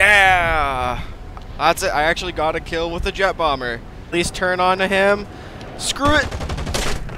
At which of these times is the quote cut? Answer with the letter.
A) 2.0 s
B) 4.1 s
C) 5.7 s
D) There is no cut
B